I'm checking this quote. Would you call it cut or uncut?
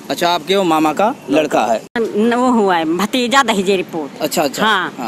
cut